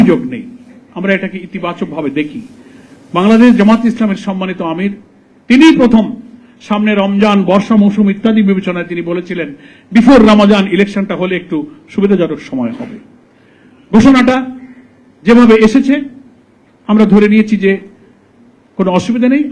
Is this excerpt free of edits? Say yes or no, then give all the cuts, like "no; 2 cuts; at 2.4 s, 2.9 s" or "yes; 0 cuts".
yes; 0 cuts